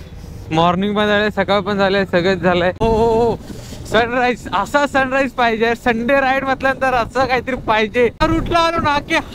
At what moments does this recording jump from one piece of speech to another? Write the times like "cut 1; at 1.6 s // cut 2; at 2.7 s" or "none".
cut 1; at 2.8 s // cut 2; at 8.2 s